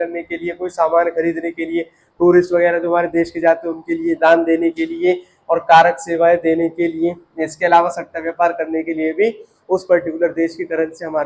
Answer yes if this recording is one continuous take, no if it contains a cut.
yes